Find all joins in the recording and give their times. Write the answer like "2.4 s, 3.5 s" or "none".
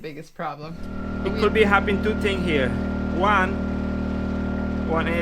1.0 s